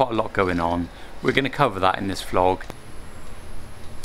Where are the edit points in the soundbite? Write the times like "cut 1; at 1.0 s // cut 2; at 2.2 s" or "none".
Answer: cut 1; at 2.8 s